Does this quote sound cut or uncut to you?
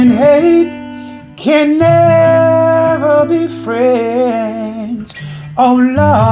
uncut